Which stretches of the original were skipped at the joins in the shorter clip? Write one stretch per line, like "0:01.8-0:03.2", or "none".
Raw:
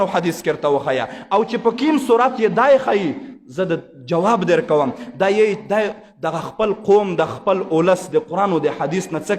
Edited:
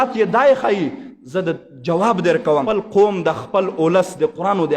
0:04.9-0:06.6